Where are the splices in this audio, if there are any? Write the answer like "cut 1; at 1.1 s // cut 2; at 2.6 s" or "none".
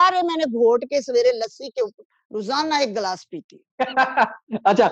none

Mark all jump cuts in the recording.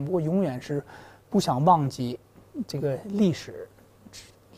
none

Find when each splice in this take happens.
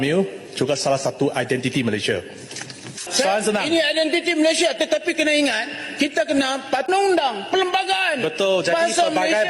cut 1; at 3.1 s

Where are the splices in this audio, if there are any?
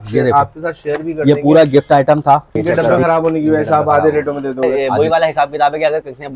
cut 1; at 2.5 s // cut 2; at 4.7 s

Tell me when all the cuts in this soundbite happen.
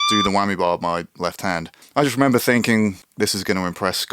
cut 1; at 1.7 s // cut 2; at 3.0 s

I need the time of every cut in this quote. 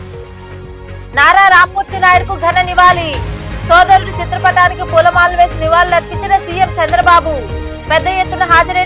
cut 1; at 1.0 s

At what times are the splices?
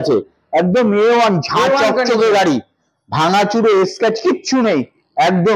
none

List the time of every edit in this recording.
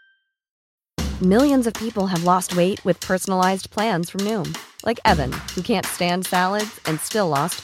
none

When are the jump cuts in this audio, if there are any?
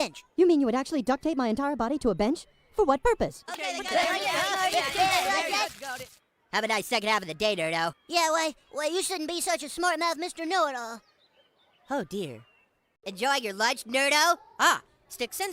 none

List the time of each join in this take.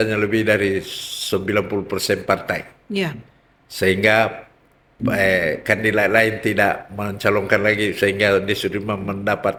none

